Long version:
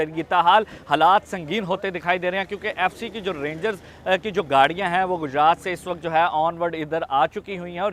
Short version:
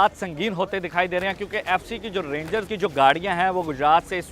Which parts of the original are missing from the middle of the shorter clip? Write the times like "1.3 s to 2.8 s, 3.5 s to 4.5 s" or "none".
3.8 s to 4.3 s